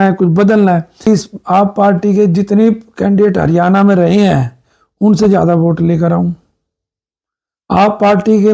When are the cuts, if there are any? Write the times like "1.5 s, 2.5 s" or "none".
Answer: 1.1 s